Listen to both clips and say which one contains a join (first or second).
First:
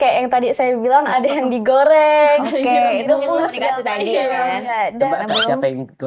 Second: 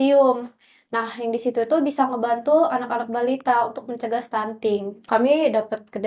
second